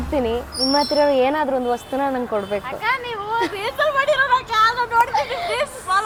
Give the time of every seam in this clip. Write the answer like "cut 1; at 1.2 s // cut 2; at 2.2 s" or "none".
none